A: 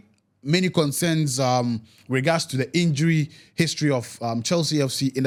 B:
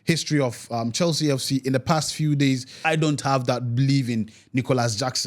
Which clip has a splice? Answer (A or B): B